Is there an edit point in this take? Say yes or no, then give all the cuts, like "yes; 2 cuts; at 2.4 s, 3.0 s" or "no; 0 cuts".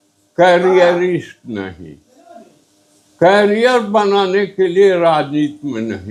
no; 0 cuts